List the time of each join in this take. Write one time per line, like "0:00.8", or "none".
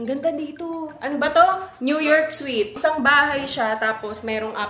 0:02.8